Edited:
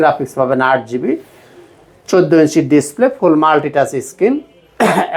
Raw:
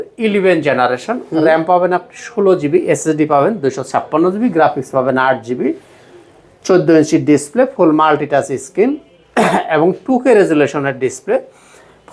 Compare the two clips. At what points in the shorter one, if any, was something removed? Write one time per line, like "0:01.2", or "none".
none